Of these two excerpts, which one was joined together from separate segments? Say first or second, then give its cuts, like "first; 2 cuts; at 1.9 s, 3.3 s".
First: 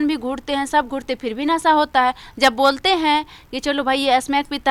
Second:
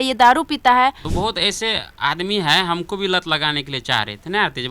second; 1 cut; at 1.0 s